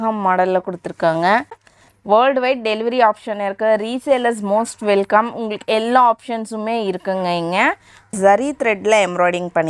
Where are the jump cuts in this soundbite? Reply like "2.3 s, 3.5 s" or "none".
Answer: 1.7 s, 8.1 s